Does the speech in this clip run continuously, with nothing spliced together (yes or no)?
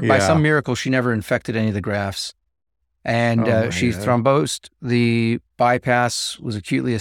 yes